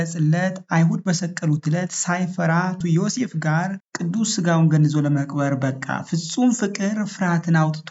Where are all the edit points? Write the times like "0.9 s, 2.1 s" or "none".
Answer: 2.8 s